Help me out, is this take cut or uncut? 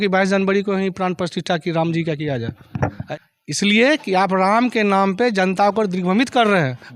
cut